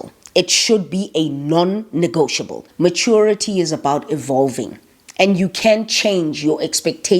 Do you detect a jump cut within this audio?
yes; 1 cut; at 2.6 s

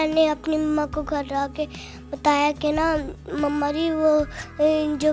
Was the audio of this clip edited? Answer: no; 0 cuts

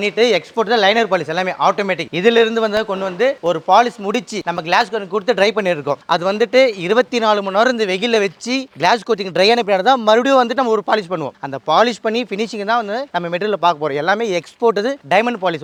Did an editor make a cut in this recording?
no; 0 cuts

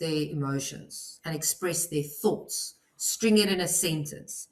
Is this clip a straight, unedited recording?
yes; 0 cuts

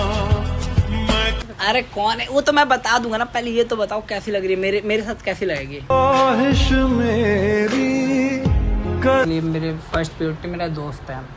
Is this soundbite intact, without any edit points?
no; 2 cuts; at 1.4 s, 9.2 s

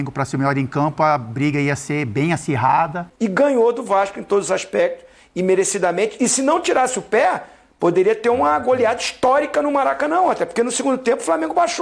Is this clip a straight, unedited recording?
no; 1 cut; at 3.0 s

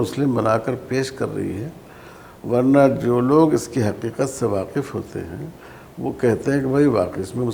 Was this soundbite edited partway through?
no; 0 cuts

